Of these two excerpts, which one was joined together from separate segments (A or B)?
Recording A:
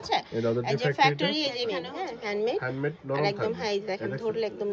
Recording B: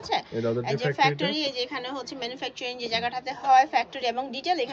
A